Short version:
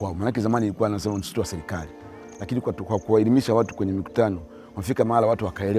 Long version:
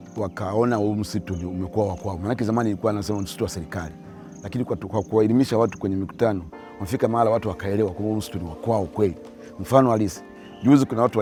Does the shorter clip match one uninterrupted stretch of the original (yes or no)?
yes